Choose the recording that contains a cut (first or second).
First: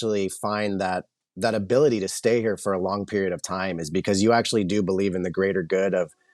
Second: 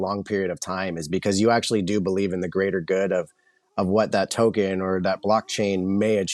first